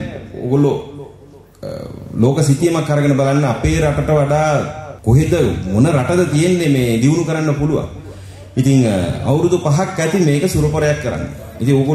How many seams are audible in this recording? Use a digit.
1